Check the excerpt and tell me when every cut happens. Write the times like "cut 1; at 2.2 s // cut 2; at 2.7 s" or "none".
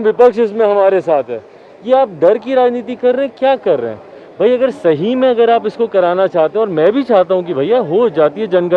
none